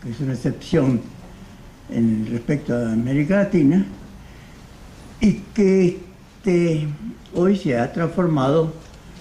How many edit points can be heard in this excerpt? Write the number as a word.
one